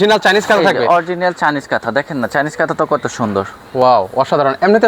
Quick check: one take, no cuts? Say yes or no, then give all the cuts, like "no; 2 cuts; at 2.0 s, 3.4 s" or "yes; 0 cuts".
yes; 0 cuts